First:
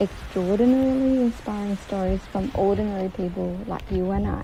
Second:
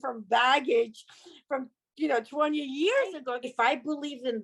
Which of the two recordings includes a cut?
second; 1 cut; at 3.3 s

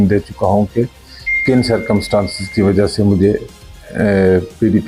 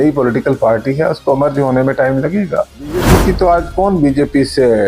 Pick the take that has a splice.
second; 1 cut; at 3.1 s

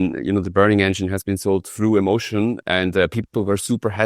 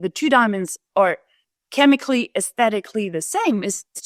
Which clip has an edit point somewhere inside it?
first; 1 cut; at 2.6 s

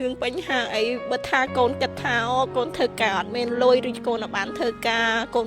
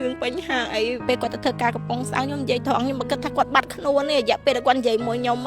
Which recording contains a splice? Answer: second; 1 cut; at 1.0 s

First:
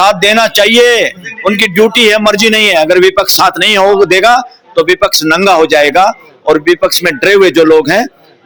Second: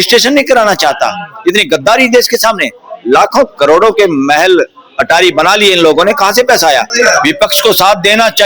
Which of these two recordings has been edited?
second; 1 cut; at 6.9 s

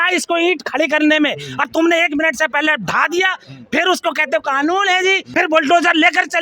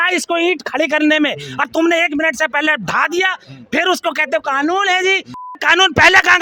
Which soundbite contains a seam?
first; 1 cut; at 5.3 s

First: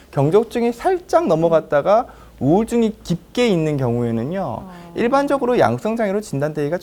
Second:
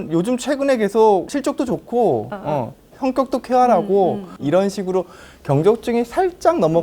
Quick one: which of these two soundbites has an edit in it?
second; 2 cuts; at 1.3 s, 4.3 s

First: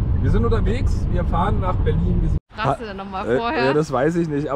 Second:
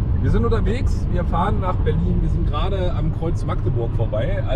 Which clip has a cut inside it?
first; 1 cut; at 2.4 s

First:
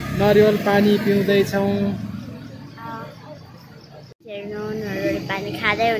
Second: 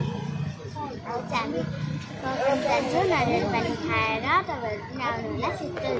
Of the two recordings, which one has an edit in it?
first; 1 cut; at 4.2 s

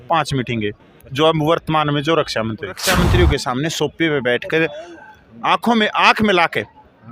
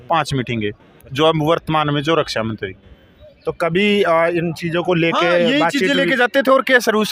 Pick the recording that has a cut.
first; 1 cut; at 2.8 s

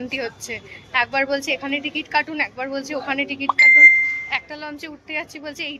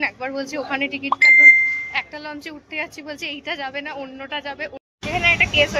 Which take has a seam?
second; 1 cut; at 4.7 s

